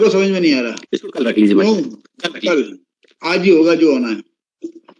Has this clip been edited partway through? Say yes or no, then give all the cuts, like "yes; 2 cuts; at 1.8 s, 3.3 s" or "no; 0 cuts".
no; 0 cuts